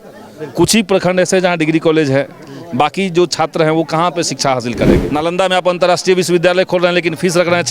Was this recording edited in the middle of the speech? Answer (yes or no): yes